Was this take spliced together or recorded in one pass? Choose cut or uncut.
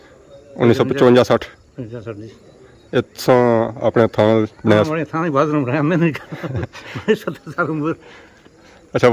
uncut